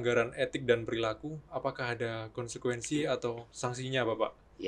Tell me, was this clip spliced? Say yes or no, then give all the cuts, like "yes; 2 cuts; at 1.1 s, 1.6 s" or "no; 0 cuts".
no; 0 cuts